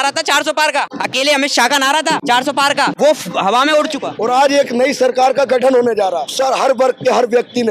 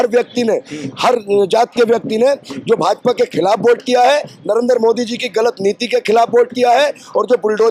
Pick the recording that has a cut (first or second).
first